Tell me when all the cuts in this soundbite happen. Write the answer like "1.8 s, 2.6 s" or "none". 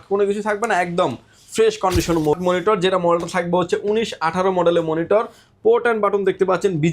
2.3 s

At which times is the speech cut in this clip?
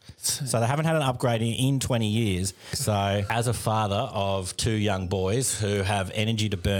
3.0 s

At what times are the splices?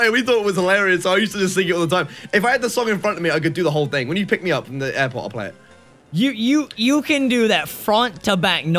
none

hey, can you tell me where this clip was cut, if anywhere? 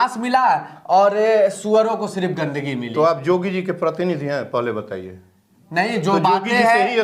none

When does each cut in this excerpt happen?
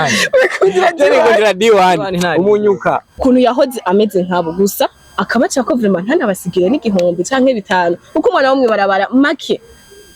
3.2 s

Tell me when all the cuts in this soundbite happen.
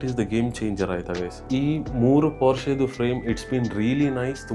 1.4 s

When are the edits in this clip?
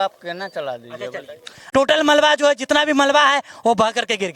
1.5 s

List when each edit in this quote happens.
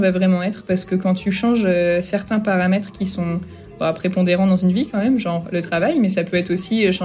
none

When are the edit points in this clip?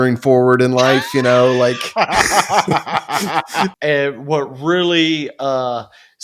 3.7 s

